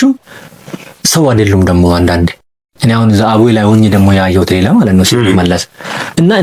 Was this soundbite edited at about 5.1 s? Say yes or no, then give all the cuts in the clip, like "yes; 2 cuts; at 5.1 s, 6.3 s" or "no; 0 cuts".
no; 0 cuts